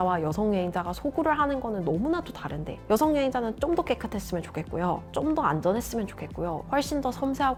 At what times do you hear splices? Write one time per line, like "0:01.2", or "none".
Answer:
none